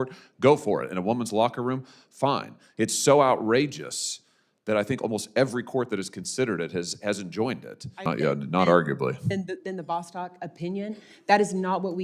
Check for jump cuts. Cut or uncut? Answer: cut